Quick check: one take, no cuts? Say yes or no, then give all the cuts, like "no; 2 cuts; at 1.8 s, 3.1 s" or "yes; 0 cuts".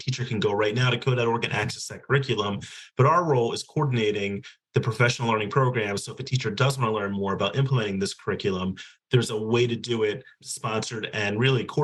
yes; 0 cuts